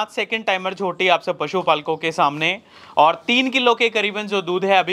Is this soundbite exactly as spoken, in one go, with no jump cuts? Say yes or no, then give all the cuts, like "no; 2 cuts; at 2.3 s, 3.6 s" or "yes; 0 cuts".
yes; 0 cuts